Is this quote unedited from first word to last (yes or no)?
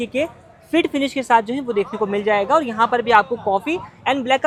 yes